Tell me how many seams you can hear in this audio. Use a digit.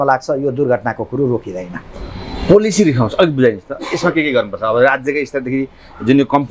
0